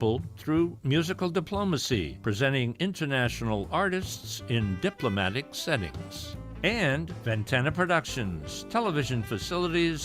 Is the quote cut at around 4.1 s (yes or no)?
no